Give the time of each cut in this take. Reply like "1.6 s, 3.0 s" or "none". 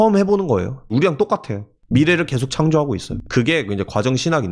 0.9 s, 3.1 s